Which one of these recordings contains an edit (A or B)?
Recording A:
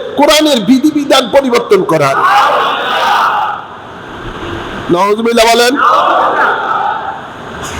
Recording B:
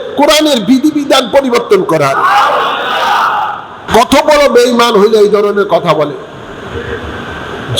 B